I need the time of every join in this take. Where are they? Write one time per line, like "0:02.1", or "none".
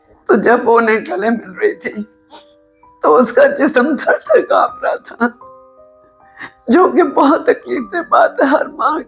none